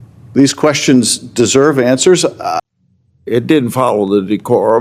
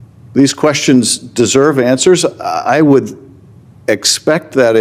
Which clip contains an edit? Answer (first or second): first